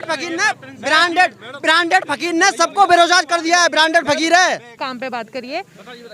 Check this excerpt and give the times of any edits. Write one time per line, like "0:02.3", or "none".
none